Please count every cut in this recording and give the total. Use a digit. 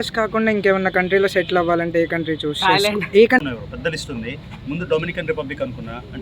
1